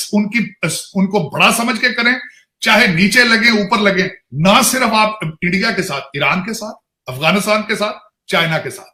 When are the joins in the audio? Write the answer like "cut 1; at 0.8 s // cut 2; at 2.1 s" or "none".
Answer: none